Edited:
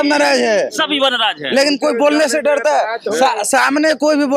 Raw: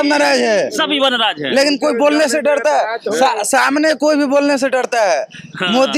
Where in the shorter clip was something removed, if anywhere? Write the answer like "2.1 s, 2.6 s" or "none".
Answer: none